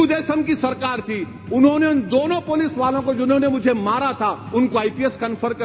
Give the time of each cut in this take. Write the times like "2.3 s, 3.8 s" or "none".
none